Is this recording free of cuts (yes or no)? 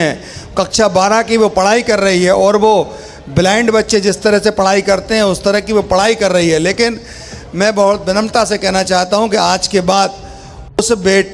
yes